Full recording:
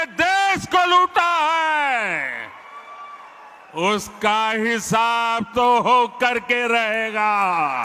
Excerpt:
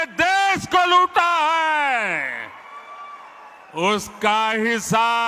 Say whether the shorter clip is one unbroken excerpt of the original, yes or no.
yes